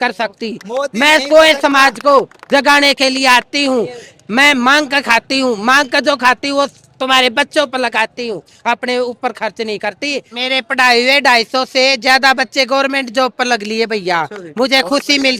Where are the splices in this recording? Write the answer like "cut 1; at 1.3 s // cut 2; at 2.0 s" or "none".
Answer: cut 1; at 10.3 s